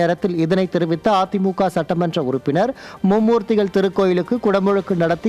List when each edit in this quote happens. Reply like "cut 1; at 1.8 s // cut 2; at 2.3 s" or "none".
none